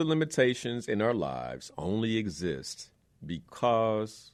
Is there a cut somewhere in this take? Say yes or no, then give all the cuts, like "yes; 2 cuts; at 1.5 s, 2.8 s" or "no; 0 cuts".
no; 0 cuts